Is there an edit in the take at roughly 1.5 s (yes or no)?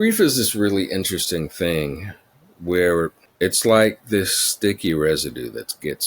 no